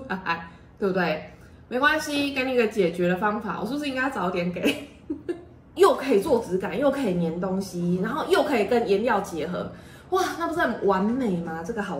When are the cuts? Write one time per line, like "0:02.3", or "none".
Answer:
0:05.7

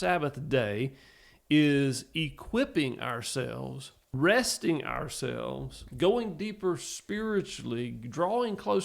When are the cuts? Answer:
0:04.1

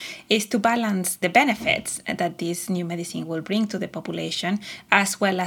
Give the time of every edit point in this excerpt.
0:01.1

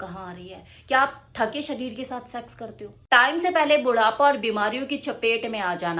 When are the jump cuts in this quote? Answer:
0:02.9

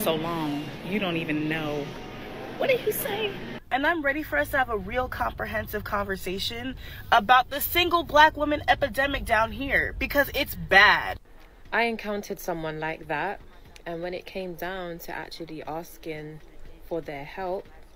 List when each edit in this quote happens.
0:03.5
0:11.2

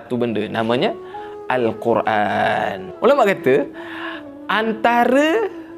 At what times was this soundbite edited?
0:02.9

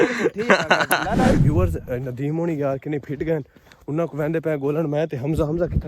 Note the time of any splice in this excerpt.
0:01.4

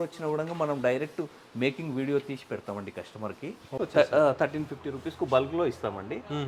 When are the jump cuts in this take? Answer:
0:03.8

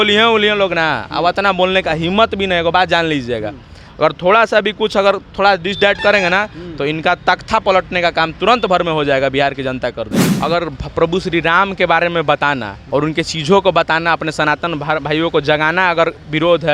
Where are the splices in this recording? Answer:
0:10.3
0:12.7

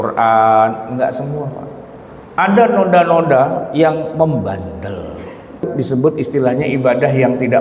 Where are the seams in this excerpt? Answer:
0:05.7

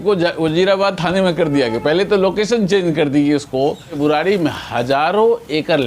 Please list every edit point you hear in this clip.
0:04.0

